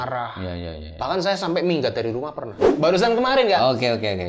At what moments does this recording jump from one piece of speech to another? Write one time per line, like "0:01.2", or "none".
0:02.6